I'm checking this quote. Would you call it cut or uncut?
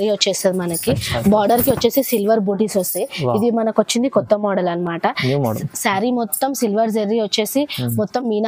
uncut